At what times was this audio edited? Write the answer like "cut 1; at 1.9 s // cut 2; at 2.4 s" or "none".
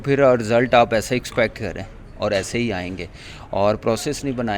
none

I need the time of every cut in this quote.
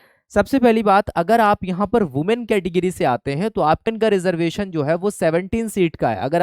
cut 1; at 3.8 s

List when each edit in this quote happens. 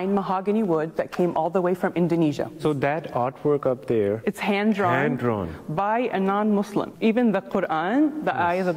cut 1; at 0.9 s // cut 2; at 2.6 s // cut 3; at 4.2 s // cut 4; at 6.9 s

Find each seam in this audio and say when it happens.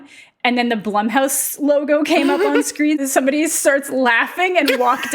cut 1; at 3.0 s

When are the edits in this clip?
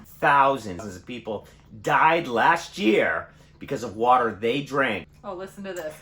cut 1; at 0.9 s // cut 2; at 5.1 s

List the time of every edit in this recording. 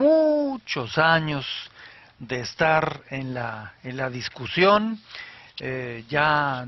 none

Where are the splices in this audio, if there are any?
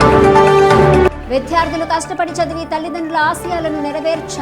cut 1; at 1.0 s

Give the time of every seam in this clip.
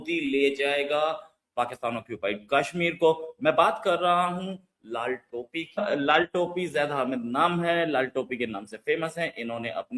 none

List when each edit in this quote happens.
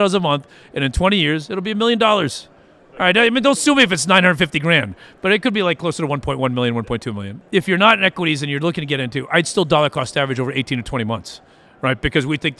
cut 1; at 7.3 s

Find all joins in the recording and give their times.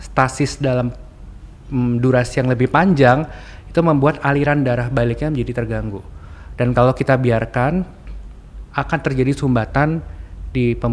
none

